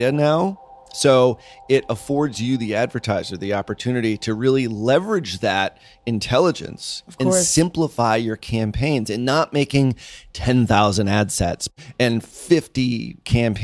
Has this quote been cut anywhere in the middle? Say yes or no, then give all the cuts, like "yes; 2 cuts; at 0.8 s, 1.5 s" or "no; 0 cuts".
yes; 1 cut; at 11.7 s